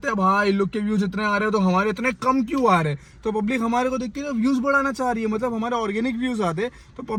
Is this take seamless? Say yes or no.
yes